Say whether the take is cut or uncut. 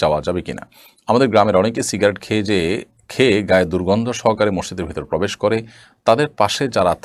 uncut